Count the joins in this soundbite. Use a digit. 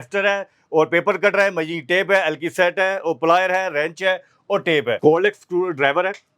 1